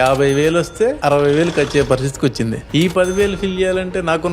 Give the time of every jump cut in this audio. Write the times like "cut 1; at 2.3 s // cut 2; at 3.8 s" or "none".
cut 1; at 1.0 s // cut 2; at 2.6 s